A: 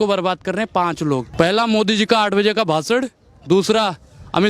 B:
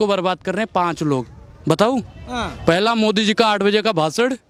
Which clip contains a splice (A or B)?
A